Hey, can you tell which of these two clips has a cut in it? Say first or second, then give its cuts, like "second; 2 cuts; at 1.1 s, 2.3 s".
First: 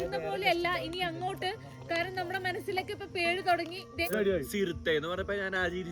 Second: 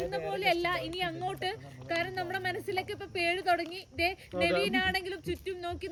first; 1 cut; at 4.1 s